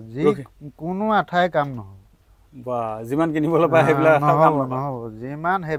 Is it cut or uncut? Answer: uncut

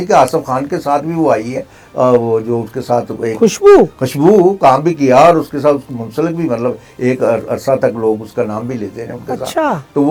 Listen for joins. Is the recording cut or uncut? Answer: uncut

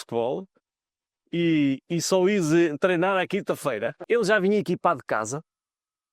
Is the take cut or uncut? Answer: cut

